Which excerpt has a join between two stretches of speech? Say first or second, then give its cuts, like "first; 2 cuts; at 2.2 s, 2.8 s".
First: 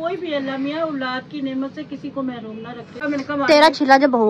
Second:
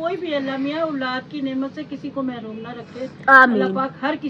first; 1 cut; at 3.0 s